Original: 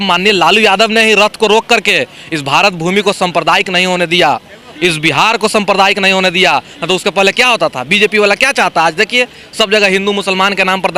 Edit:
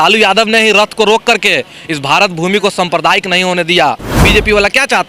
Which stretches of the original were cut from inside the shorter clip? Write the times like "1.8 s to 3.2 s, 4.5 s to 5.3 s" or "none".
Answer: 4.6 s to 7.8 s